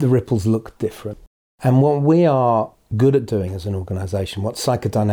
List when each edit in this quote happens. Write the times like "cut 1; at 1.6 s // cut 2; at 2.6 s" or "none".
cut 1; at 2.8 s